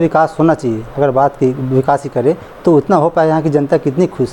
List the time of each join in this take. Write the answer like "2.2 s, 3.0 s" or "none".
none